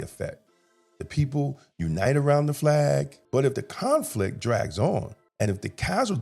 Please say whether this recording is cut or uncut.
cut